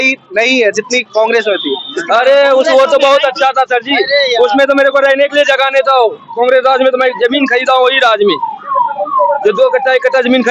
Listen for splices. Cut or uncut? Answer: uncut